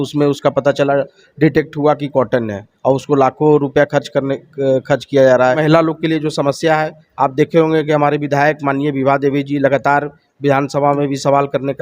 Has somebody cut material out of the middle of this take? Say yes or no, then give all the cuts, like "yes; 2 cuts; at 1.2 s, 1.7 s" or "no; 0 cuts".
yes; 1 cut; at 5.6 s